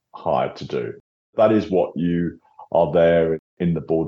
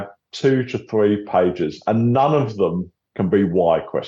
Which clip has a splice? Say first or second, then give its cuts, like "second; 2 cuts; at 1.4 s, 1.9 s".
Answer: second; 1 cut; at 2.9 s